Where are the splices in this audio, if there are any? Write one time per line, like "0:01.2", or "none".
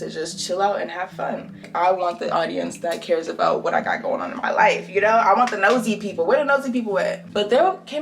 0:01.6
0:07.2

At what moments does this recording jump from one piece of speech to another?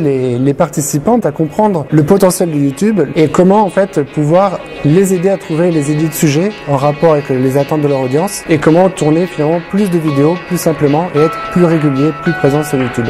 0:01.2
0:03.1
0:08.4

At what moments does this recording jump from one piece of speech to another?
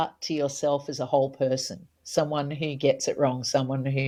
none

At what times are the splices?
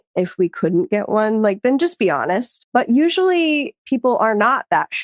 0:02.5

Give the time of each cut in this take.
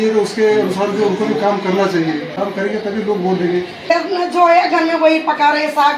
0:02.3
0:03.9

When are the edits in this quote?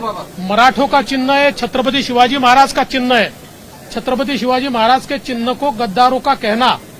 none

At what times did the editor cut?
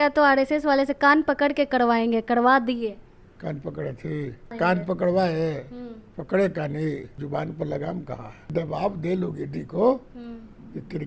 0:04.5
0:07.2
0:08.5

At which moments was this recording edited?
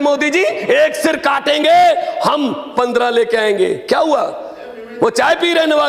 none

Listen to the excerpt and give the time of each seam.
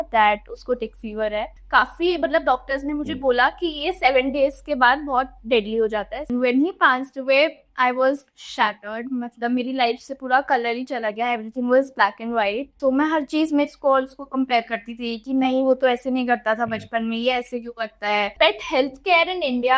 0:01.6
0:06.3
0:12.7
0:18.3

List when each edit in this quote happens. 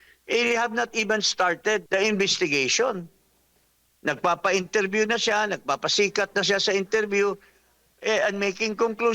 0:01.8

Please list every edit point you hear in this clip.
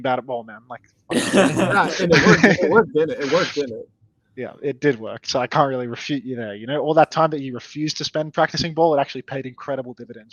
none

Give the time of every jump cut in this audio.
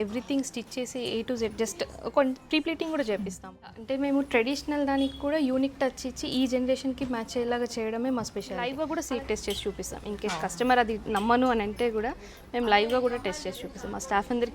0:03.8
0:08.7

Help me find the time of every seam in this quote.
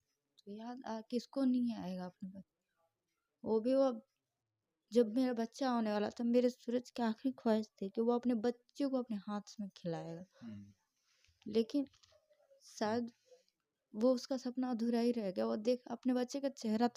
none

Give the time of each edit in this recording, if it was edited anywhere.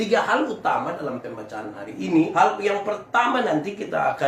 0:02.3

